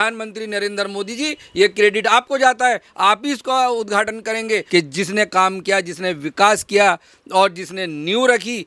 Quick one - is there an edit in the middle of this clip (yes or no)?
yes